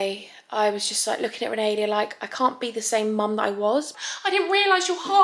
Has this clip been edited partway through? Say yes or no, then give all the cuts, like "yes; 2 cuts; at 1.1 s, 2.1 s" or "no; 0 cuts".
yes; 1 cut; at 4.0 s